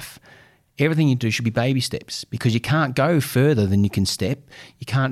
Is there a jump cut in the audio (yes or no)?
no